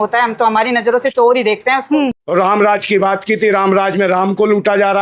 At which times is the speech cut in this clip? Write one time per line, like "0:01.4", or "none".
0:02.2